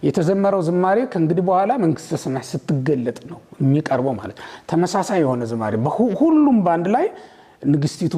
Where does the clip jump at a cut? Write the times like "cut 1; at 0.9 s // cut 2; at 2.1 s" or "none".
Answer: none